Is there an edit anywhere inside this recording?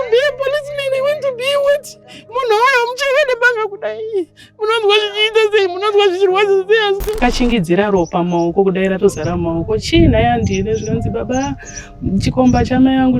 yes; 1 cut; at 7.1 s

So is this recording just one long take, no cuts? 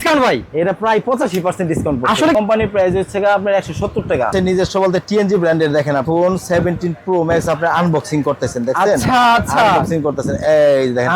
no; 3 cuts; at 2.3 s, 4.3 s, 6.0 s

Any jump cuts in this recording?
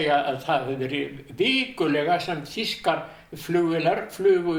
no; 0 cuts

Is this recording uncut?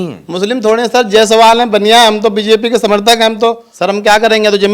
no; 1 cut; at 3.7 s

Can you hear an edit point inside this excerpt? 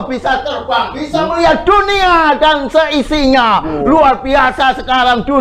no; 0 cuts

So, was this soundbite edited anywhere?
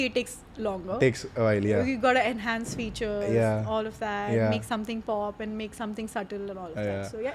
no; 0 cuts

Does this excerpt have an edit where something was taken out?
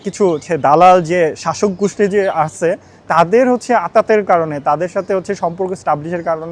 no; 0 cuts

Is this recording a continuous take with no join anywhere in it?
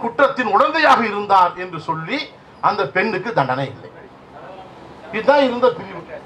yes; 0 cuts

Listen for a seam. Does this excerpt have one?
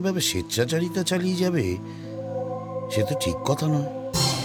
no; 0 cuts

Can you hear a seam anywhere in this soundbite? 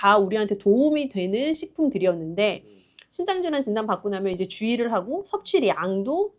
no; 0 cuts

